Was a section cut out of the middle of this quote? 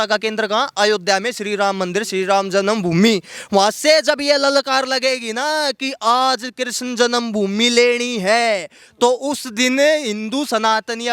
no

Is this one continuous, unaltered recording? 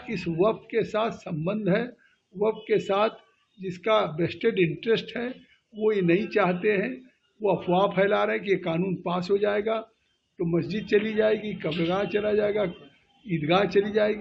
yes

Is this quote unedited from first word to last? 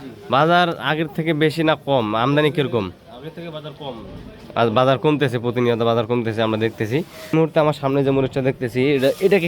no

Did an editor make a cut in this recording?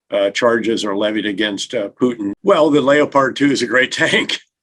yes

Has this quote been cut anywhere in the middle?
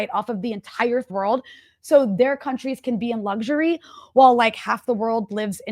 yes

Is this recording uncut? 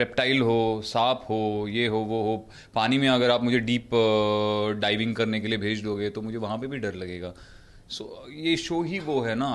yes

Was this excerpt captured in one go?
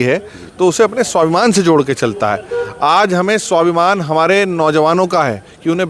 yes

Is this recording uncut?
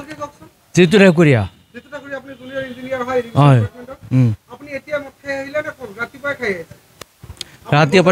yes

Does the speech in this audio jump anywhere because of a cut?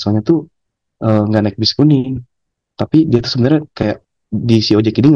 no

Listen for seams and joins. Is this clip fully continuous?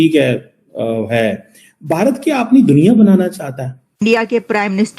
no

